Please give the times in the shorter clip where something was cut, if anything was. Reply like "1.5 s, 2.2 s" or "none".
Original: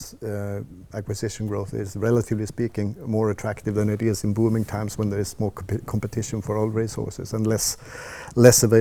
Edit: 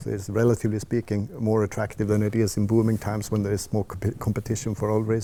none